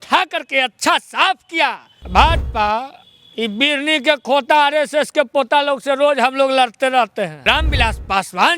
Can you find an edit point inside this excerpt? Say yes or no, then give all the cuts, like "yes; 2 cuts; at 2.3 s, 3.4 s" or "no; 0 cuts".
yes; 2 cuts; at 1.9 s, 7.4 s